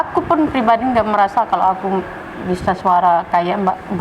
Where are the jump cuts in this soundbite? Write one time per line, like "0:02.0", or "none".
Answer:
none